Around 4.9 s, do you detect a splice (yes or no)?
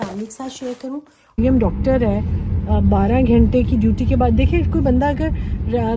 no